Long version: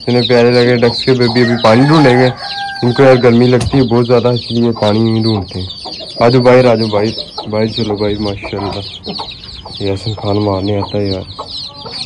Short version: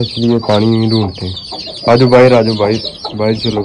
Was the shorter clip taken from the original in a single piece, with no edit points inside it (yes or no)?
yes